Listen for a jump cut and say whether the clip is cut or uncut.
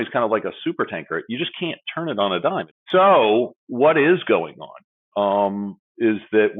cut